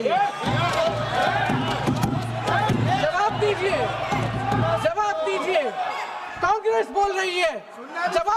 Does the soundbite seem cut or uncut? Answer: uncut